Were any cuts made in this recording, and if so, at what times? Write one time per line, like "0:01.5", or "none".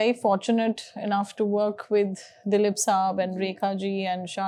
none